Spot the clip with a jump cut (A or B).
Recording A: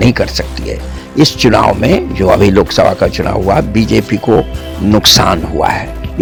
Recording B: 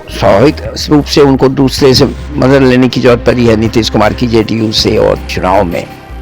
B